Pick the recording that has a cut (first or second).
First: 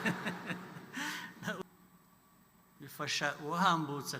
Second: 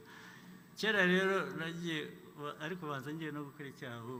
first